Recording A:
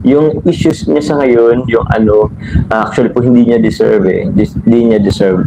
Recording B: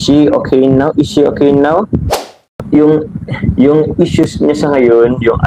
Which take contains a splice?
B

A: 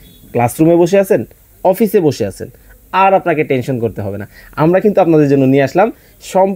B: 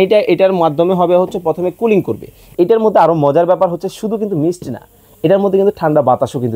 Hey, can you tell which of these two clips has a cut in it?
B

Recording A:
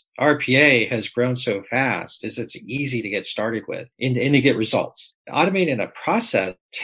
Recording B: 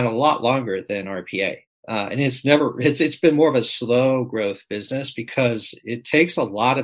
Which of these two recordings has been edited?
A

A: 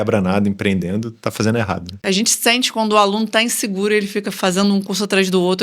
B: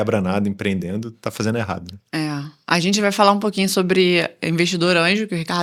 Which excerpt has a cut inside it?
A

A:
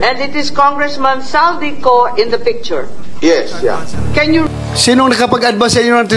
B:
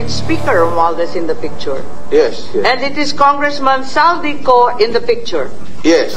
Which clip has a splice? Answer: A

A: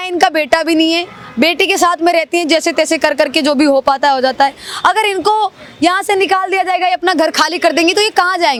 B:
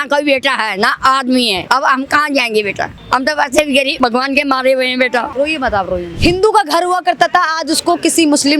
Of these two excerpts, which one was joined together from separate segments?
B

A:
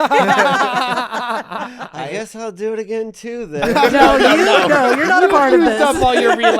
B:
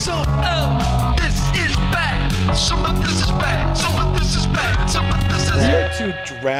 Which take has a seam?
A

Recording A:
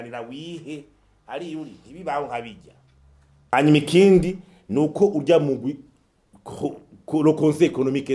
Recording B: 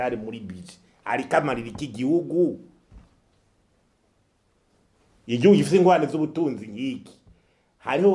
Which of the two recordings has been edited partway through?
A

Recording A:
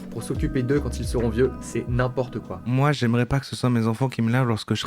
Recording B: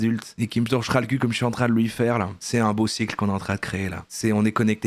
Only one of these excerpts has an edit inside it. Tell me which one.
A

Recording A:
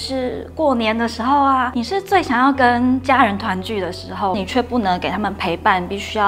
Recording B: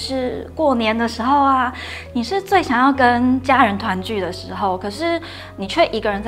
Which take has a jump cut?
A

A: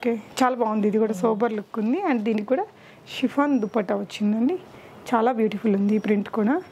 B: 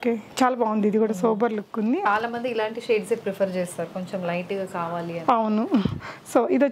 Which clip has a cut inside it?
B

